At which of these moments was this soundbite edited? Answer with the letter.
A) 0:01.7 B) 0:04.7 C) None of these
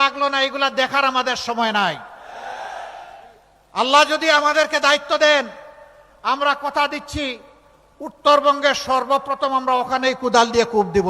A